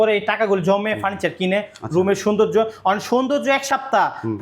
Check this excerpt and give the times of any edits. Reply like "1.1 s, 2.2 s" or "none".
none